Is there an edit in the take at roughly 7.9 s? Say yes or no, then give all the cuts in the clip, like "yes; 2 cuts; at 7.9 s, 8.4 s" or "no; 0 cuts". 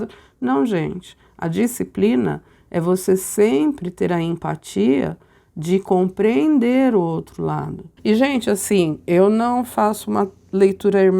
yes; 1 cut; at 7.9 s